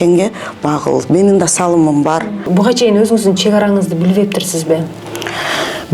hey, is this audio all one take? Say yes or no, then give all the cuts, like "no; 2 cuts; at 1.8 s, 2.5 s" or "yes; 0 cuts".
no; 1 cut; at 2.4 s